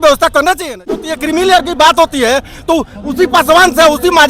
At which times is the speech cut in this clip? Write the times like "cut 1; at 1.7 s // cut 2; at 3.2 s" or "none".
cut 1; at 1.1 s